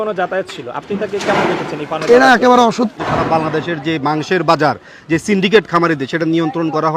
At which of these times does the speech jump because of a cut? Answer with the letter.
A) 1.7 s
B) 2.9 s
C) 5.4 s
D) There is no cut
B